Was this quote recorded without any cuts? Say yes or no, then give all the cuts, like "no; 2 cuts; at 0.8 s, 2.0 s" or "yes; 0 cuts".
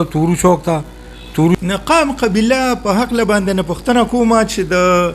no; 1 cut; at 1.6 s